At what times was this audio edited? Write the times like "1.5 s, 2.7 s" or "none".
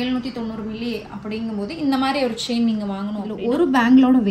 3.3 s